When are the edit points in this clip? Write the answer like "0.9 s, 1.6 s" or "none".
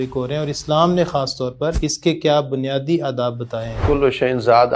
1.9 s, 3.8 s